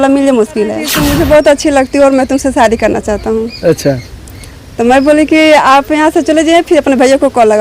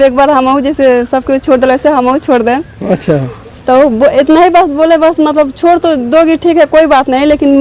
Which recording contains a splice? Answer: first; 1 cut; at 0.9 s

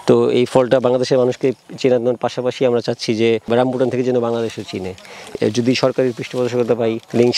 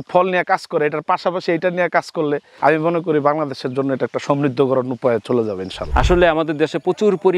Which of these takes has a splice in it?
second; 1 cut; at 5.8 s

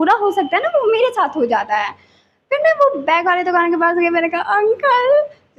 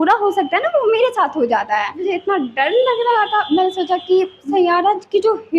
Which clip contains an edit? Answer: second; 2 cuts; at 2.0 s, 4.4 s

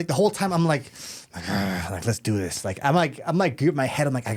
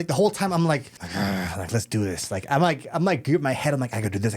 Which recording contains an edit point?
second; 1 cut; at 1.0 s

